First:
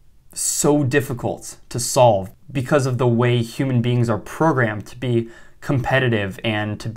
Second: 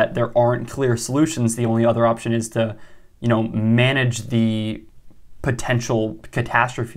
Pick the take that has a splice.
first; 1 cut; at 2.4 s

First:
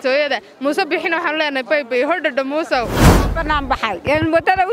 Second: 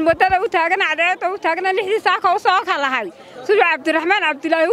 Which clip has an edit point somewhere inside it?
first; 1 cut; at 3.0 s

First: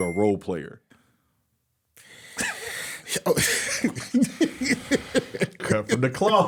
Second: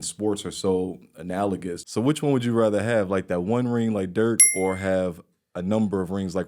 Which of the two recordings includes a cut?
second; 1 cut; at 1.7 s

